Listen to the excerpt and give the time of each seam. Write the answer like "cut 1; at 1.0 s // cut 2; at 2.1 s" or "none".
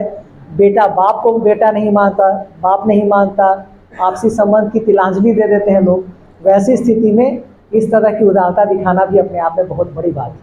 none